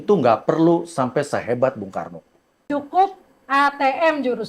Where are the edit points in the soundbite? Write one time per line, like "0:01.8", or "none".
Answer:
0:02.6